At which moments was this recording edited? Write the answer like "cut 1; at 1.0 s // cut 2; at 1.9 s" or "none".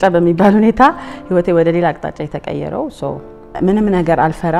cut 1; at 3.5 s